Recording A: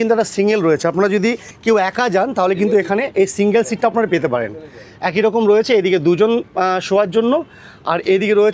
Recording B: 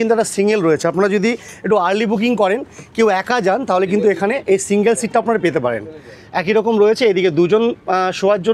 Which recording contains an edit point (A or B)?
A